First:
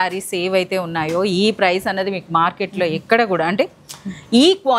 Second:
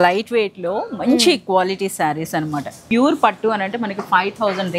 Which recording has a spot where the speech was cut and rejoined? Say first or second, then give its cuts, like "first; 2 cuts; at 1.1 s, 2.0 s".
second; 1 cut; at 2.8 s